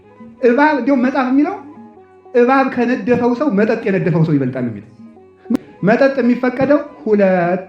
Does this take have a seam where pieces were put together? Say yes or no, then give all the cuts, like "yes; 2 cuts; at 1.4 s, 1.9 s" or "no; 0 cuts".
yes; 1 cut; at 5.6 s